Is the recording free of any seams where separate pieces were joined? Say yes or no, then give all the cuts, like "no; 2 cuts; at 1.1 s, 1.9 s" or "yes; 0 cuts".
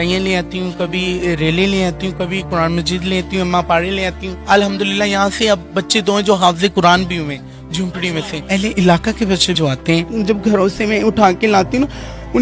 no; 2 cuts; at 4.3 s, 8.3 s